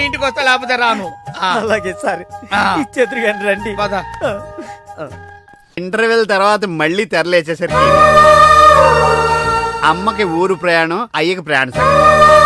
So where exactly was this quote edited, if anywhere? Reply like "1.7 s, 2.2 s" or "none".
5.8 s